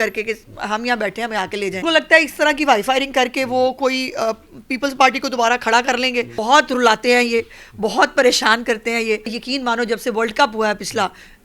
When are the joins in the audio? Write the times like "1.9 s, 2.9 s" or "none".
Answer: 1.8 s, 6.3 s, 9.4 s